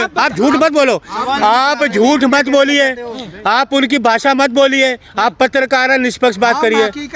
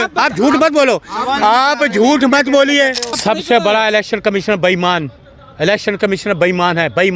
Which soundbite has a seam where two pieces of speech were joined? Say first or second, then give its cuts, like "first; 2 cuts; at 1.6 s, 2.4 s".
second; 1 cut; at 3.2 s